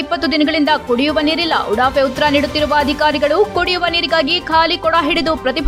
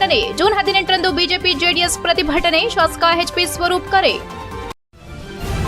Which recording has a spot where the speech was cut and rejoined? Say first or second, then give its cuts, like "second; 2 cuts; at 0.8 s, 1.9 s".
second; 1 cut; at 4.8 s